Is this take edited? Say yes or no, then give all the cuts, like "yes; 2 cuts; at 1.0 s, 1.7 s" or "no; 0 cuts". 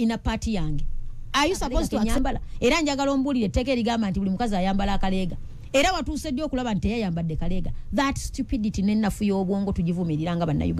yes; 1 cut; at 1.9 s